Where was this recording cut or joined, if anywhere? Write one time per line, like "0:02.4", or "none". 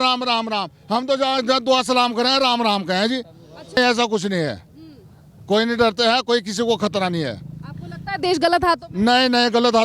0:03.8